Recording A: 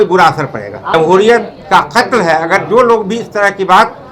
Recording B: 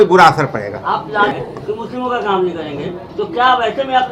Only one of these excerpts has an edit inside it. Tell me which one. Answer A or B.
A